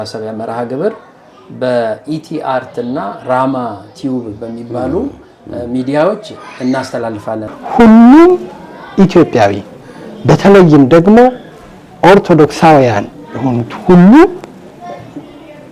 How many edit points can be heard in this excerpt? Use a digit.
1